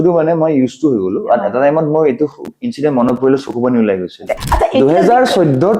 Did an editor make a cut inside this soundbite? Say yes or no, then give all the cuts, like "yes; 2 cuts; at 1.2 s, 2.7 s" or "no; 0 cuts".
yes; 1 cut; at 4.4 s